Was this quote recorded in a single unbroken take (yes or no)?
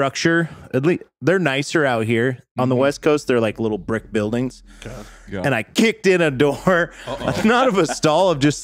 yes